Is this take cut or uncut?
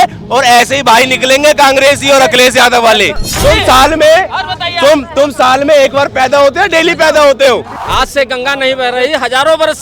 cut